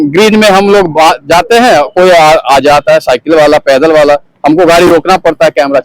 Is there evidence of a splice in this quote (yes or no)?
no